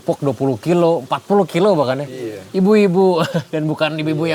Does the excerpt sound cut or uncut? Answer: uncut